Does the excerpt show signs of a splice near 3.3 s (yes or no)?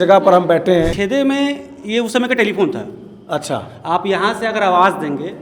no